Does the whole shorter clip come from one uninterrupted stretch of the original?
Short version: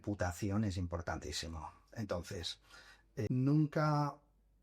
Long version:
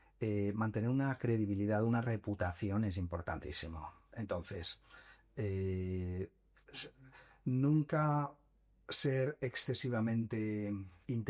no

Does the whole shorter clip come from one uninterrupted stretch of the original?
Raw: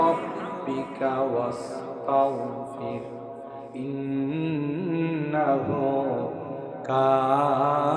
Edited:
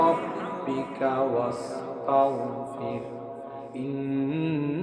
yes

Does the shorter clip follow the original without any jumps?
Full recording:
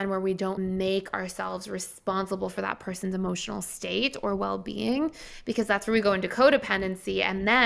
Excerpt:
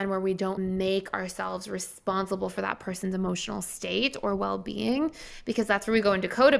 yes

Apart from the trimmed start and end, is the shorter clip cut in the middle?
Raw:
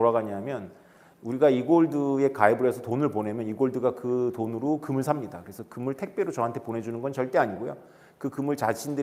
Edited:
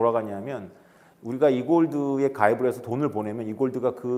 no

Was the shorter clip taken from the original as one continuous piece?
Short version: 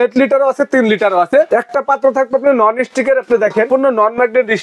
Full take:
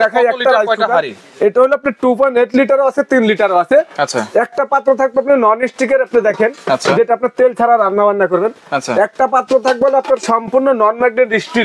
no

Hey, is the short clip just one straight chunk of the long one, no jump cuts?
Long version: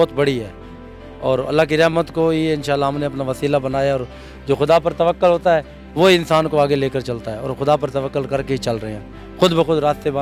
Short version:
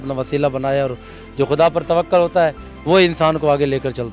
yes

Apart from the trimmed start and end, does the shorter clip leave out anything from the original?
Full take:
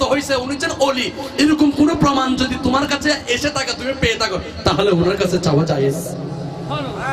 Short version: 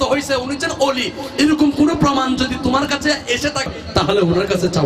yes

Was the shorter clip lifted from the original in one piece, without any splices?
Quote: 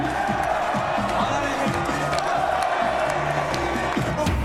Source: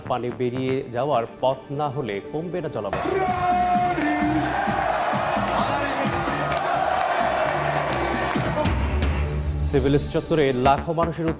yes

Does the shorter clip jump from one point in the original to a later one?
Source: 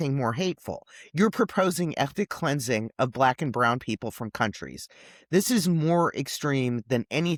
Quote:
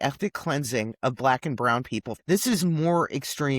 yes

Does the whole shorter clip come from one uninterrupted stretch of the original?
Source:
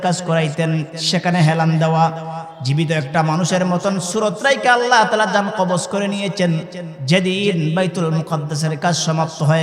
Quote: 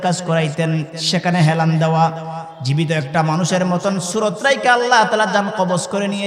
yes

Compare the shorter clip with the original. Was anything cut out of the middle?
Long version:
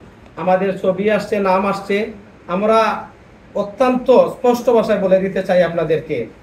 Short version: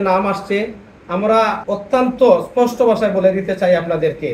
yes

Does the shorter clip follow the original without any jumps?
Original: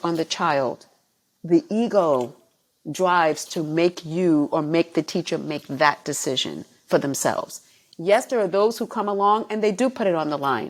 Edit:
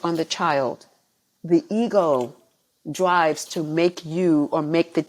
yes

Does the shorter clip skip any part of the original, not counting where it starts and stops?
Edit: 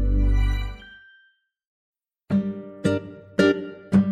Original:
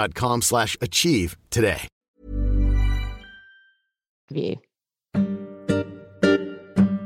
yes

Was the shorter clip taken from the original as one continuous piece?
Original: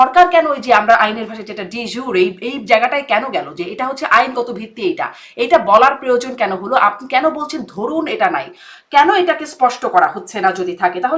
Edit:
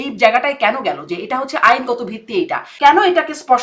no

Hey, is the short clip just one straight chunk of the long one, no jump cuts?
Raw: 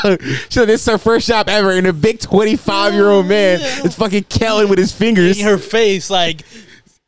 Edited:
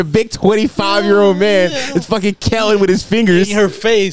yes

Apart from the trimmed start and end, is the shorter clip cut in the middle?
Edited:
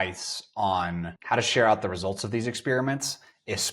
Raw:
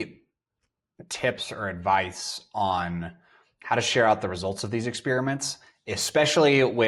yes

